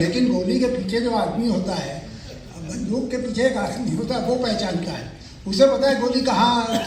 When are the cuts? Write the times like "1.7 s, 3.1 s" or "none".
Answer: none